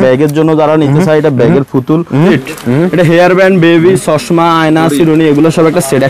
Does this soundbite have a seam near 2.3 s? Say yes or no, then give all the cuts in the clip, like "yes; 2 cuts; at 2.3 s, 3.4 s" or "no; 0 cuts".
yes; 1 cut; at 2.3 s